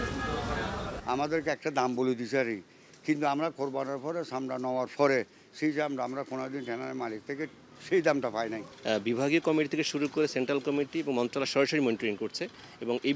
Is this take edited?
yes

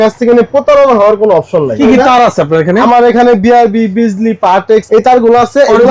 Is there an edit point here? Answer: yes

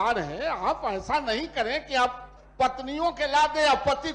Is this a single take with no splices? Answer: yes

